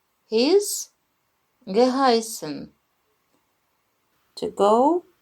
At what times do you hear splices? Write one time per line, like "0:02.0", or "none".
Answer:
0:03.7